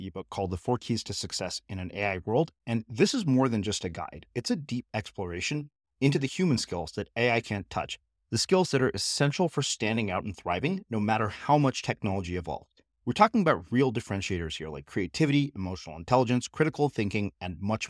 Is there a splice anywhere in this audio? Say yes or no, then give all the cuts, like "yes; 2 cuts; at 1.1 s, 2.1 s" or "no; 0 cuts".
no; 0 cuts